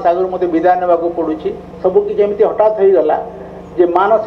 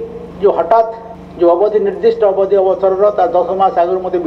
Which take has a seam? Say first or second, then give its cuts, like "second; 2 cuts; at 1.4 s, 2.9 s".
first; 1 cut; at 1.7 s